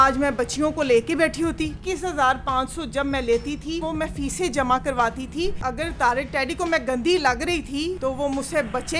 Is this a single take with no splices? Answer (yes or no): no